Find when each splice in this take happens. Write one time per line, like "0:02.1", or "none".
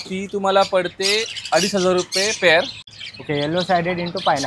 0:02.8